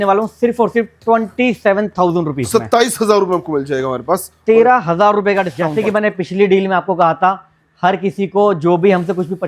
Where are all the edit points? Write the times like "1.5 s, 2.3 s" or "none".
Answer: 5.6 s